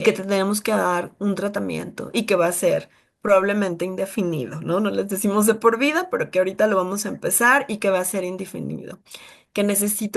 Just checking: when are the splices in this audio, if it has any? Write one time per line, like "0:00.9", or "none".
none